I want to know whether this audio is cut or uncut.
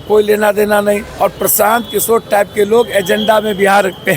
cut